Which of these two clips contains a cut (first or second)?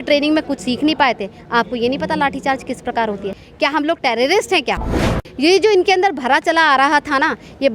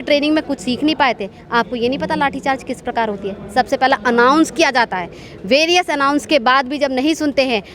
first